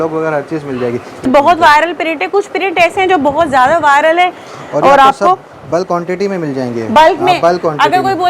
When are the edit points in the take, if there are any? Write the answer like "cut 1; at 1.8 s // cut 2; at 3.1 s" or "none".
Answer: cut 1; at 1.2 s